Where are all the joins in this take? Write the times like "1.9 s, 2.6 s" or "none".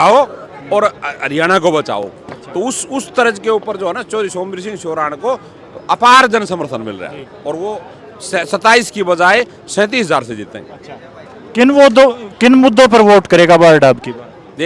none